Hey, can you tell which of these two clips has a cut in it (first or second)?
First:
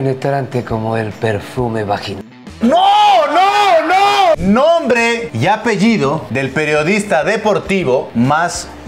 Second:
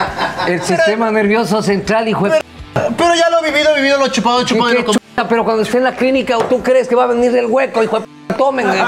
first